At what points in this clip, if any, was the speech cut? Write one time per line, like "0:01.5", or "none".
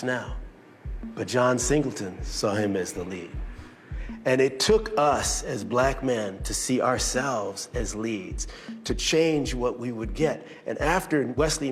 none

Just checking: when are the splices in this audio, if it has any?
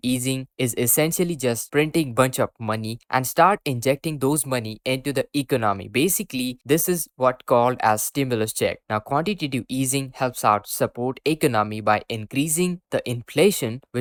none

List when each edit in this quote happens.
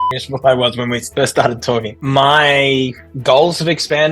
0:02.0

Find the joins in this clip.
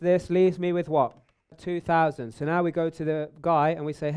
0:01.6

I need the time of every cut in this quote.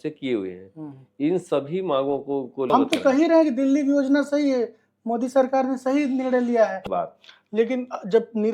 0:02.7
0:06.8

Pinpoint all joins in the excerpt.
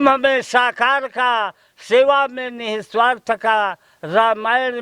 none

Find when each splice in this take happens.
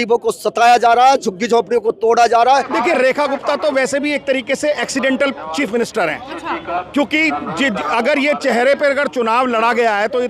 0:02.7

